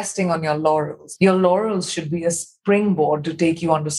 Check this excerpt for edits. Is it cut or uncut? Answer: cut